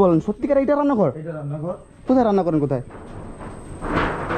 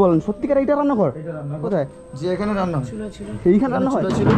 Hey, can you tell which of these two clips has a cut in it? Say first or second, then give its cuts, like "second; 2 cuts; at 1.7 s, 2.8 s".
second; 1 cut; at 1.7 s